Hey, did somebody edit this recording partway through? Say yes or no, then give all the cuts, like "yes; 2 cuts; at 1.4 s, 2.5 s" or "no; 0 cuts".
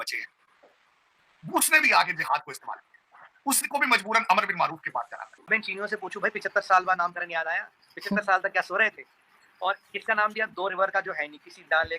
yes; 1 cut; at 5.5 s